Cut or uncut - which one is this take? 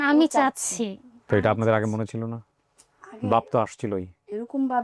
uncut